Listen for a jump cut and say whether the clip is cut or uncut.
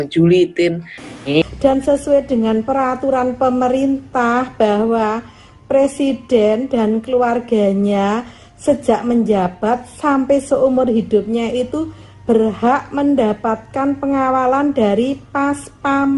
cut